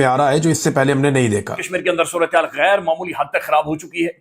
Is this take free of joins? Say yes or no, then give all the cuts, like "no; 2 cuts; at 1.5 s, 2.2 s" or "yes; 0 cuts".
no; 1 cut; at 1.6 s